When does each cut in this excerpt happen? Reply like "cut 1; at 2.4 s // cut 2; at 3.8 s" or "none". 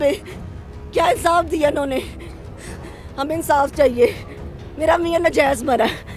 none